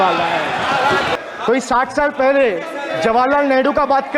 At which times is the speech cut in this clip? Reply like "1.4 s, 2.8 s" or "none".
1.1 s